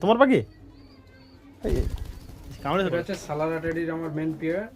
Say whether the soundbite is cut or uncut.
cut